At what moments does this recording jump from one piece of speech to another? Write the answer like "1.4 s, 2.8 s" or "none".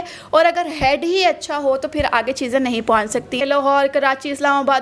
3.4 s